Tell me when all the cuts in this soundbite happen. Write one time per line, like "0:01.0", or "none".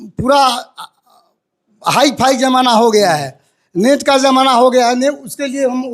none